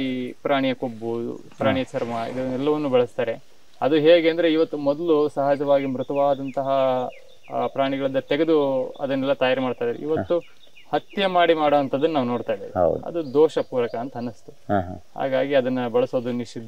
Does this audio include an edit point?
no; 0 cuts

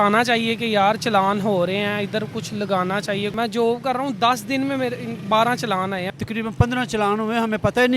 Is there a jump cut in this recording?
yes; 2 cuts; at 3.3 s, 6.1 s

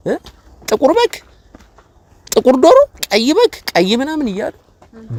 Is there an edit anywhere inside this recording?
no; 0 cuts

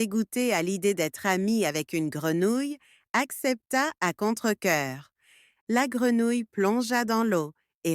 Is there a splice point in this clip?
yes; 1 cut; at 6.2 s

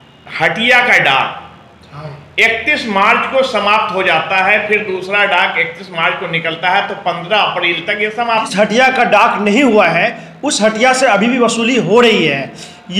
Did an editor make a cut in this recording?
yes; 1 cut; at 8.5 s

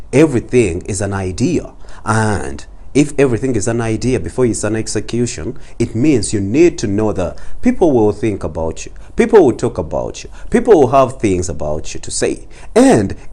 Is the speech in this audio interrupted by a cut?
no; 0 cuts

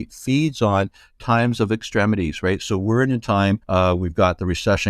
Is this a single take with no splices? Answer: no; 1 cut; at 3.6 s

